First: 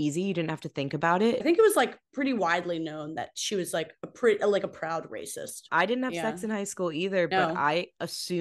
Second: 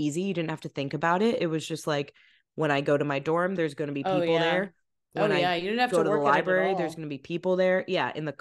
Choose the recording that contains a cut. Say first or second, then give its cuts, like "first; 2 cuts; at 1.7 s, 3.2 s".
first; 2 cuts; at 1.4 s, 5.6 s